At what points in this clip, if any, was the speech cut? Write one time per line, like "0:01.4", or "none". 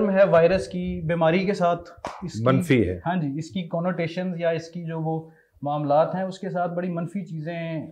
none